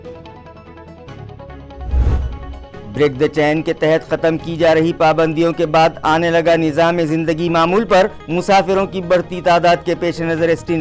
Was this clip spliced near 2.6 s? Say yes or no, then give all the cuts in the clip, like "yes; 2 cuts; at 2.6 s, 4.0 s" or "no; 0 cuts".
yes; 1 cut; at 2.6 s